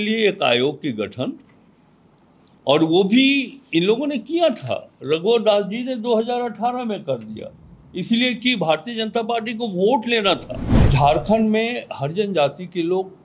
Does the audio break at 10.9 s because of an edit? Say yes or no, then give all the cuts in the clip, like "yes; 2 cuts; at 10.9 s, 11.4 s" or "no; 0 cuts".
yes; 1 cut; at 10.9 s